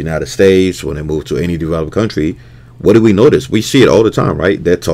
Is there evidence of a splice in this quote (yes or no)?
no